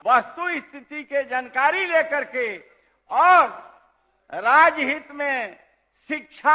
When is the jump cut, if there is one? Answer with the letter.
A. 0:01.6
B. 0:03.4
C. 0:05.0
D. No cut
D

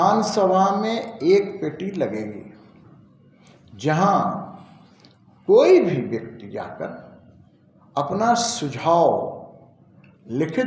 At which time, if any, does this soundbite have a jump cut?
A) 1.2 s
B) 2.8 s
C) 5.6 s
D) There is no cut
D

